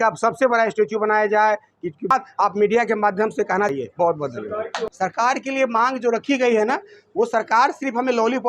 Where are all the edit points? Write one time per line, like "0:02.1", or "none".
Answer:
0:02.1